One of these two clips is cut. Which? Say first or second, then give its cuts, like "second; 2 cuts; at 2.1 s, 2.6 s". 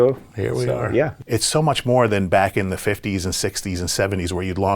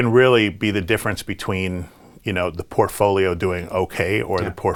first; 1 cut; at 1.2 s